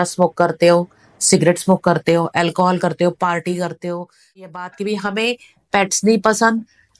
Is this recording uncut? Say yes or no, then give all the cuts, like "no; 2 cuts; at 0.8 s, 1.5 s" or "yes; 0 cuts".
no; 1 cut; at 4.6 s